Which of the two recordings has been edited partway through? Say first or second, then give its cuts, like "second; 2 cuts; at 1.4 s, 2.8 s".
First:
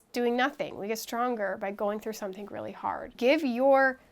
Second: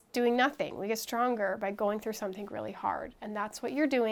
first; 1 cut; at 3.2 s